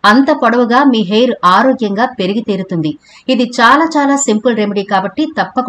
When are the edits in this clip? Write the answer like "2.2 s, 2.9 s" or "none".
3.0 s